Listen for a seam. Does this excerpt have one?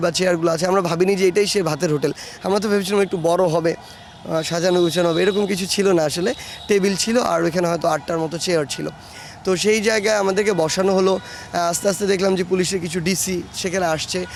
no; 0 cuts

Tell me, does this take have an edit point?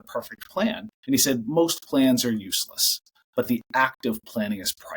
yes; 1 cut; at 0.9 s

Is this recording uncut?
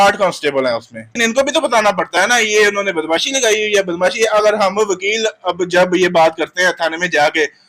no; 1 cut; at 1.1 s

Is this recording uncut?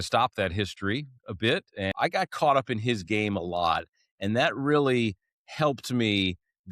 no; 1 cut; at 1.9 s

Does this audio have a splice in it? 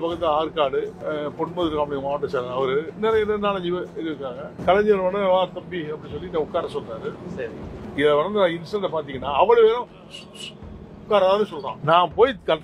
yes; 1 cut; at 2.9 s

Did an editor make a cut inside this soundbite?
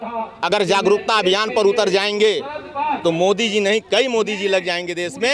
no; 0 cuts

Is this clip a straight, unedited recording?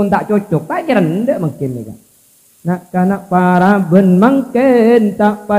yes; 0 cuts

